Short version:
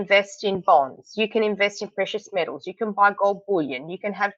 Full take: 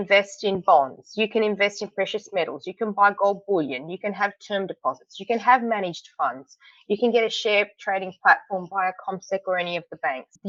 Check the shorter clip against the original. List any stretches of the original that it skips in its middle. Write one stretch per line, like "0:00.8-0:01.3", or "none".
none